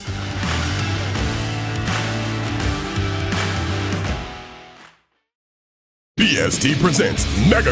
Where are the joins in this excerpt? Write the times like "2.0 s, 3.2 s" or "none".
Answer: 6.1 s